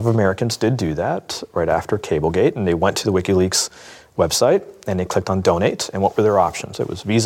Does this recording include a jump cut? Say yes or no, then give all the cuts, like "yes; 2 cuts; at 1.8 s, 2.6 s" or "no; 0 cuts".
no; 0 cuts